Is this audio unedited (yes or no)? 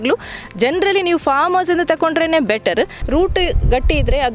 no